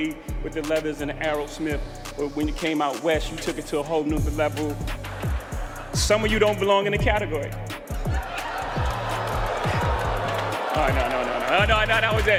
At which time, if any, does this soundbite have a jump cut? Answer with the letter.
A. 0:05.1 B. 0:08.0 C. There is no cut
C